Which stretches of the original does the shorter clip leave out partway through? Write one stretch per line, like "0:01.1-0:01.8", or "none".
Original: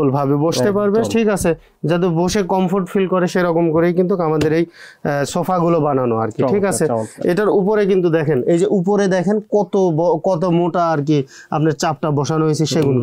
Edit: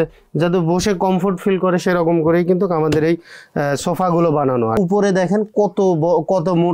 0:06.2-0:08.7